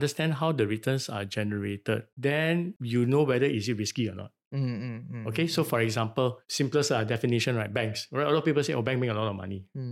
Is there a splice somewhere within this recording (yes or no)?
no